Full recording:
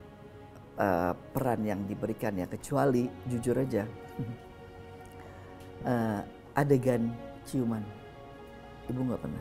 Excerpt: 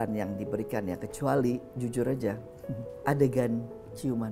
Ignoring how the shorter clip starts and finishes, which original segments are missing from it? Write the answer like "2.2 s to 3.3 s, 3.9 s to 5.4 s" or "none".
4.4 s to 6.4 s